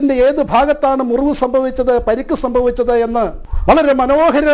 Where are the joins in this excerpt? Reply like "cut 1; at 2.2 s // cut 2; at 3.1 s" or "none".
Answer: cut 1; at 3.5 s